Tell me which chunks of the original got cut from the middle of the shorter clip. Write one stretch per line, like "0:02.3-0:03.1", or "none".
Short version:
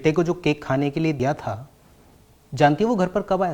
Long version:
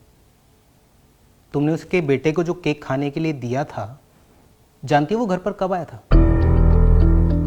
0:03.4-0:03.5